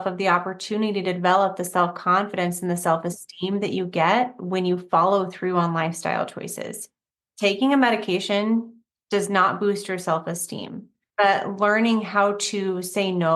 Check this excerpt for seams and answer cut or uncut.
cut